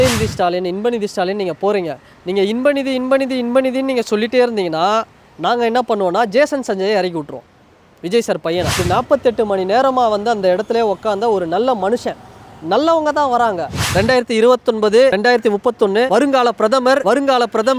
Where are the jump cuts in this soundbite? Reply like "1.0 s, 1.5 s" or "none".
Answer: 8.8 s, 13.8 s, 15.1 s, 16.1 s, 17.0 s